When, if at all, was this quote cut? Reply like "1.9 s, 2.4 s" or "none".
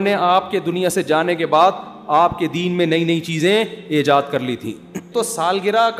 5.1 s